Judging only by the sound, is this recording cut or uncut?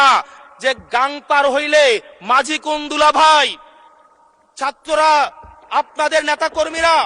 uncut